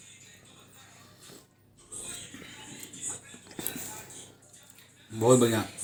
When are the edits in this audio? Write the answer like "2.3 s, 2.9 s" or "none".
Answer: none